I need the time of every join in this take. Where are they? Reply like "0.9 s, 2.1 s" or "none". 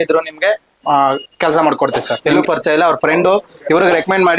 2.1 s

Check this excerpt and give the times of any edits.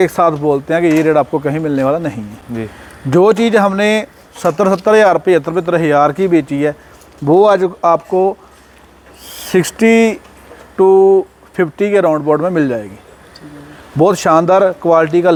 none

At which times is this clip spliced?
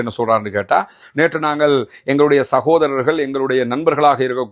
none

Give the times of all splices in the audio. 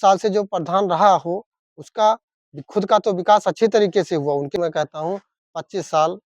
4.6 s

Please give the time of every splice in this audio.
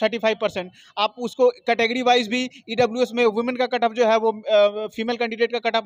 none

